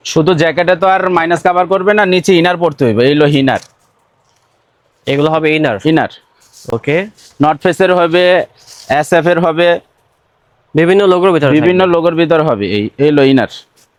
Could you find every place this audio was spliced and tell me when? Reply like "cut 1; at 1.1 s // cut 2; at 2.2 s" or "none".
none